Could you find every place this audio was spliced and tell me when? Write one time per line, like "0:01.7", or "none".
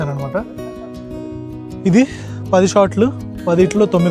none